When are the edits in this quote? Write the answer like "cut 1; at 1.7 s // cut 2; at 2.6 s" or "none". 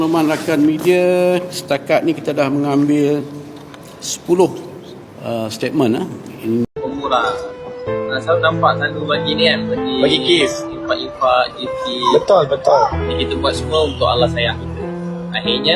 cut 1; at 6.7 s